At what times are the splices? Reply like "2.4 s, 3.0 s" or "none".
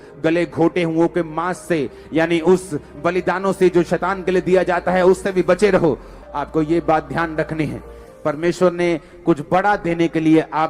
6.1 s